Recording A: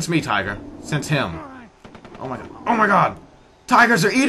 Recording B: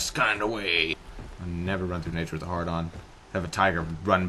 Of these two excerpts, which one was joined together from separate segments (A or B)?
B